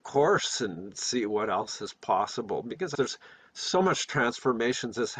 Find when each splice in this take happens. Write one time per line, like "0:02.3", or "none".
0:03.0